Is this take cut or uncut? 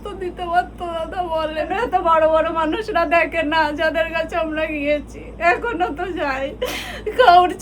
cut